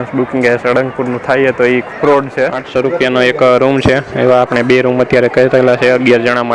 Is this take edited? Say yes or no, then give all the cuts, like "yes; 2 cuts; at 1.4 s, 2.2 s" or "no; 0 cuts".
yes; 1 cut; at 2.9 s